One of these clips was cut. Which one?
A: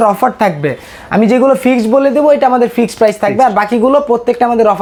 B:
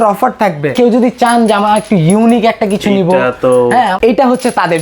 B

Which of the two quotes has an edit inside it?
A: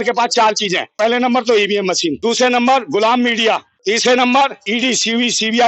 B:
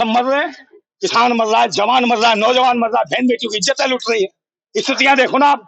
A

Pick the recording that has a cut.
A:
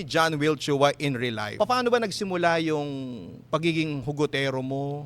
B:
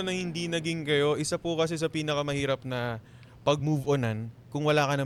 A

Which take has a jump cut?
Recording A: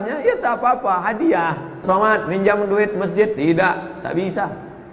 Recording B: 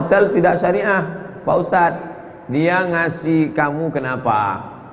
A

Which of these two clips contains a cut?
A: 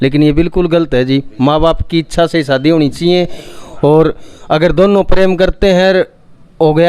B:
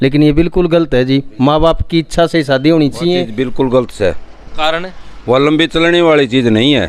B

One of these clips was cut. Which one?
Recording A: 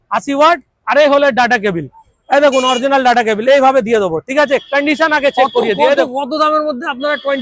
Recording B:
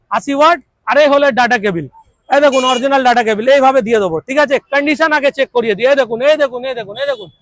A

